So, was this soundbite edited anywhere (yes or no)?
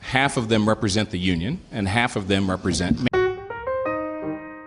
no